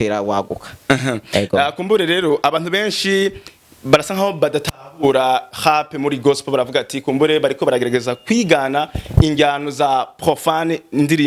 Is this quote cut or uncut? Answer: uncut